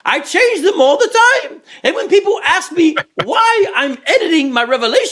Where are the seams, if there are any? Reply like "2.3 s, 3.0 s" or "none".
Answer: none